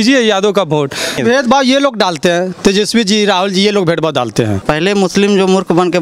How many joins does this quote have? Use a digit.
2